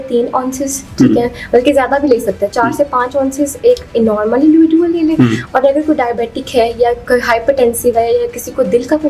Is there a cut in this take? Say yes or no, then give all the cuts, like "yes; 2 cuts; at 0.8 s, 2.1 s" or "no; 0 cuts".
no; 0 cuts